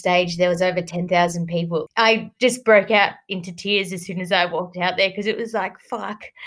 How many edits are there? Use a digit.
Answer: 1